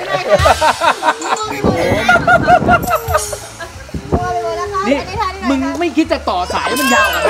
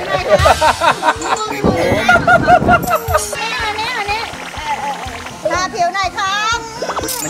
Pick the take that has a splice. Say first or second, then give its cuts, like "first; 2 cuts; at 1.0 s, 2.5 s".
second; 1 cut; at 3.4 s